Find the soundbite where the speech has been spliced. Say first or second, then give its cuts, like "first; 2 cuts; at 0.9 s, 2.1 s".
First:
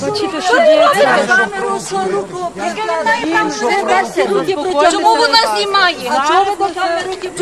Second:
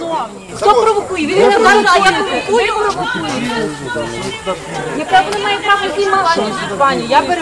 first; 1 cut; at 6.0 s